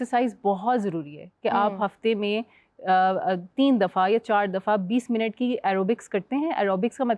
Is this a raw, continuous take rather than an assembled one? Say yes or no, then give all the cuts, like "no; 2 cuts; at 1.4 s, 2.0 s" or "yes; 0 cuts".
yes; 0 cuts